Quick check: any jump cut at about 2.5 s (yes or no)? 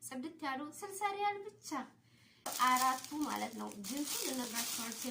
yes